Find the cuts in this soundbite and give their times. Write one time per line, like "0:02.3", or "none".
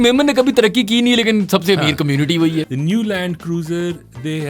0:02.7